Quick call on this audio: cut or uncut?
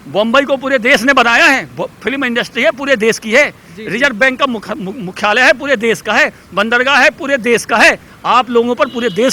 cut